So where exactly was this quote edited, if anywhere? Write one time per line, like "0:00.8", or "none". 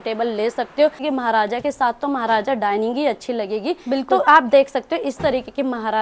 0:01.0